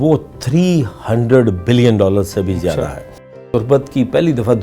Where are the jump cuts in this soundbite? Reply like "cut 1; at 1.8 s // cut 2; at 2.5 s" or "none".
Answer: cut 1; at 3.3 s